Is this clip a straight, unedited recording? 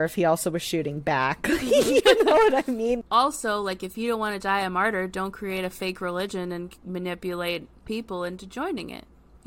no; 2 cuts; at 3.0 s, 7.7 s

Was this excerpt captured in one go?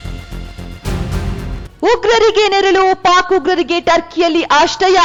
yes; 0 cuts

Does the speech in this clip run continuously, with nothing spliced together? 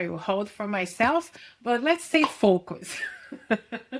yes; 0 cuts

